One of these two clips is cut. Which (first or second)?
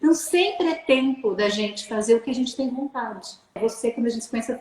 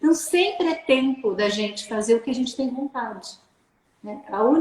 first